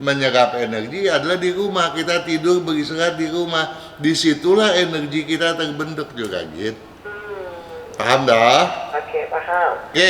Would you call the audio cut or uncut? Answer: uncut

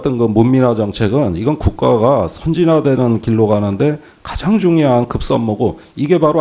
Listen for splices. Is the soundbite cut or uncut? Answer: uncut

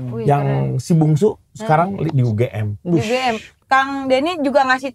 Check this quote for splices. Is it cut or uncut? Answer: cut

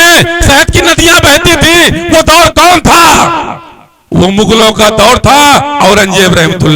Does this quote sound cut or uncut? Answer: cut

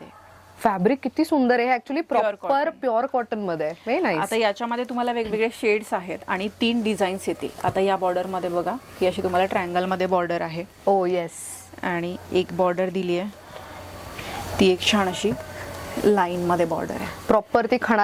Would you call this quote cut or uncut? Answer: uncut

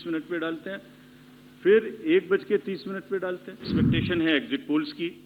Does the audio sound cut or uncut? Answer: cut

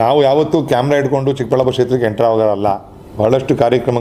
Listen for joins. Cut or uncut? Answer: uncut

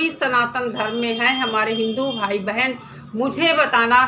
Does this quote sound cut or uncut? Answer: uncut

